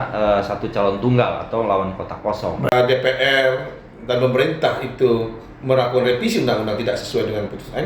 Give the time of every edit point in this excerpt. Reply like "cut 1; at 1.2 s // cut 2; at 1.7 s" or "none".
cut 1; at 2.7 s